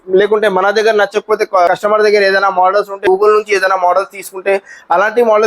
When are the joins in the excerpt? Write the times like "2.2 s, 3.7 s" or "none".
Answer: 1.7 s, 3.0 s